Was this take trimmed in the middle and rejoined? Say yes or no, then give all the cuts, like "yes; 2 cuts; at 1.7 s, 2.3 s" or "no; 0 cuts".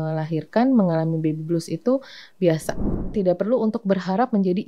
yes; 1 cut; at 2.9 s